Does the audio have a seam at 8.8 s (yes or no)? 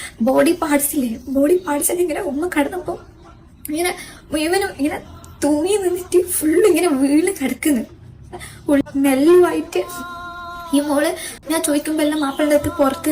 yes